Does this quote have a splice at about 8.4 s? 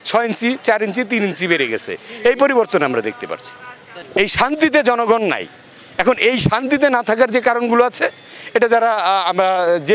no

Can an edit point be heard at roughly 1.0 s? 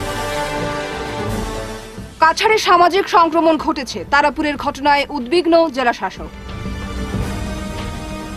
yes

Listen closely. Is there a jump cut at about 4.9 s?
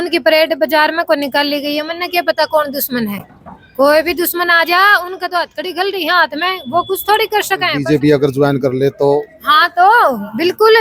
no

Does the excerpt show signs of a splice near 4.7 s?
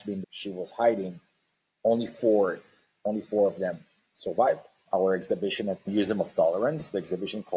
yes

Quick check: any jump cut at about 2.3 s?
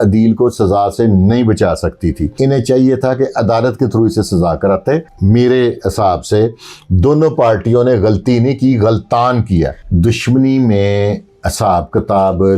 yes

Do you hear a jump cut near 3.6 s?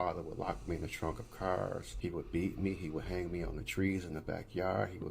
no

